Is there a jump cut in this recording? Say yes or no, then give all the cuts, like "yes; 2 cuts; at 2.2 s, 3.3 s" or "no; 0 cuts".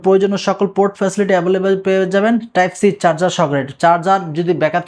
no; 0 cuts